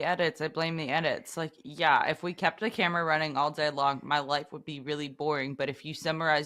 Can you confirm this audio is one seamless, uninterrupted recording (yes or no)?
yes